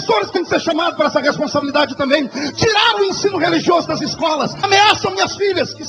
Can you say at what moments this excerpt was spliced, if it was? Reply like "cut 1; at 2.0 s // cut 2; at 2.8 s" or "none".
cut 1; at 4.5 s

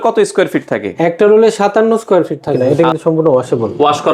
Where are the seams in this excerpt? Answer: cut 1; at 2.6 s

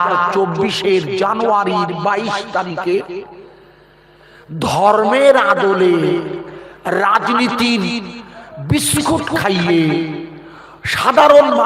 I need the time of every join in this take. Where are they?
none

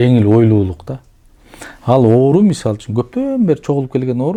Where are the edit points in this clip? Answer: none

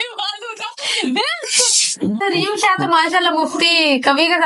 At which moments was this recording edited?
cut 1; at 2.2 s

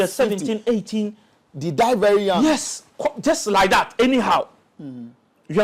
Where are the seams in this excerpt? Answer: none

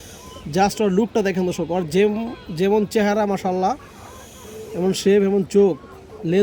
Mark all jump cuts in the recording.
none

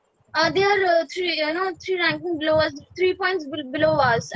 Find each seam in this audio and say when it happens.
none

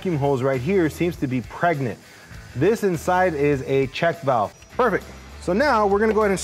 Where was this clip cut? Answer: cut 1; at 4.6 s

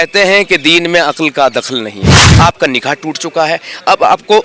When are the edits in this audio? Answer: cut 1; at 2.2 s

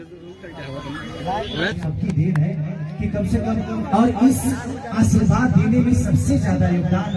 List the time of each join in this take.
cut 1; at 1.7 s

